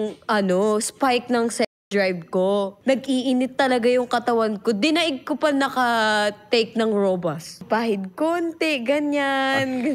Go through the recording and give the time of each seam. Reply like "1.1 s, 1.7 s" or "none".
2.7 s, 7.6 s